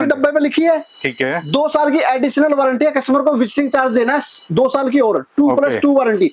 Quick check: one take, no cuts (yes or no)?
yes